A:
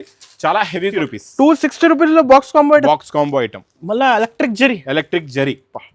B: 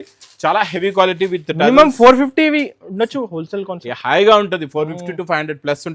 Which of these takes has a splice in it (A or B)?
A